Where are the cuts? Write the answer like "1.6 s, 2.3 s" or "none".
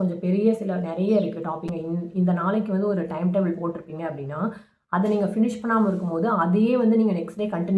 1.7 s